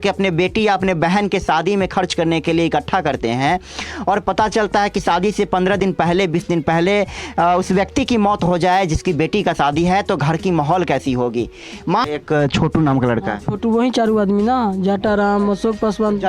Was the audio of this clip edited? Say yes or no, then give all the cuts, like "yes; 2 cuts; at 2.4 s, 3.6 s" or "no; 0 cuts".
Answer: yes; 1 cut; at 12.0 s